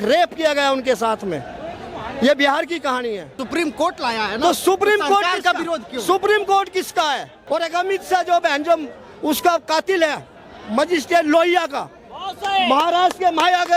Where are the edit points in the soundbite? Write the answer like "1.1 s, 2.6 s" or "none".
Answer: 3.4 s, 7.3 s